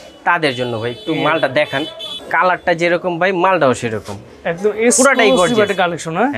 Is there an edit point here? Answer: no; 0 cuts

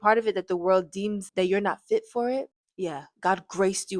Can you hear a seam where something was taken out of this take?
yes; 2 cuts; at 1.2 s, 2.6 s

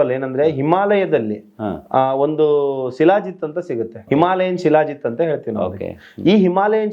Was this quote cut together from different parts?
yes; 1 cut; at 4.0 s

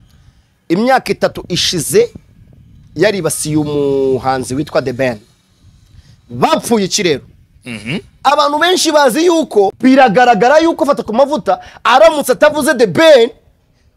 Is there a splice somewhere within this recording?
yes; 1 cut; at 9.7 s

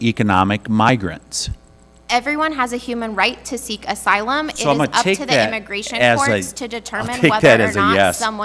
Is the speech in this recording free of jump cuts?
yes; 0 cuts

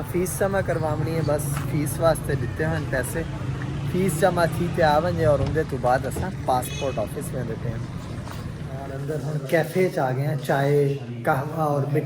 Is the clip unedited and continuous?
no; 1 cut; at 8.8 s

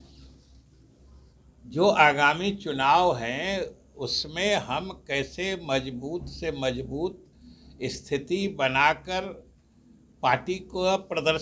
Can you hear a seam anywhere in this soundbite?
no; 0 cuts

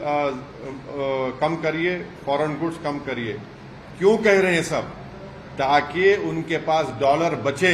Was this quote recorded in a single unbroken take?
yes; 0 cuts

